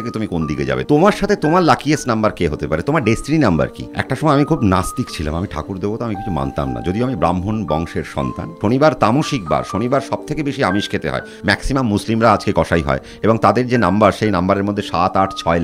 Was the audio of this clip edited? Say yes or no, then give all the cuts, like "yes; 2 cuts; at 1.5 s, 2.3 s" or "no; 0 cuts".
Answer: yes; 4 cuts; at 0.8 s, 3.9 s, 8.5 s, 11.4 s